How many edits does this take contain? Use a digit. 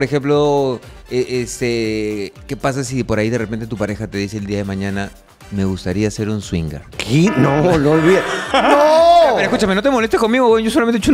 1